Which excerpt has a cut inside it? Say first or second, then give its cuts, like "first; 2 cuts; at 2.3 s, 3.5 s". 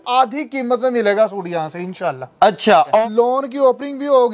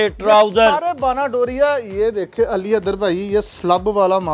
first; 1 cut; at 3.0 s